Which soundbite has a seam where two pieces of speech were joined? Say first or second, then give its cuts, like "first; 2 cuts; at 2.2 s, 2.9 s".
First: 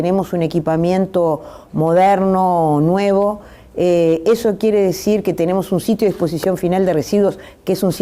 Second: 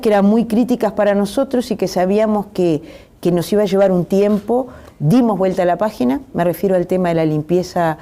first; 1 cut; at 2.0 s